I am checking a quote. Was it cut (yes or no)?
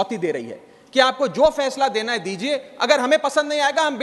no